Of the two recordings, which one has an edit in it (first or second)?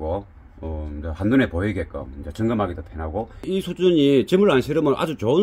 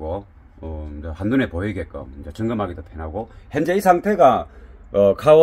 first